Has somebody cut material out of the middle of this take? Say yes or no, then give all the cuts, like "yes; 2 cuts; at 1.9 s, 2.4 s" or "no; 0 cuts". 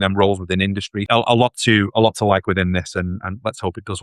yes; 1 cut; at 1.0 s